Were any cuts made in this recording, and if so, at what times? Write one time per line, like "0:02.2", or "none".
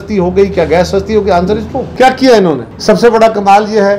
none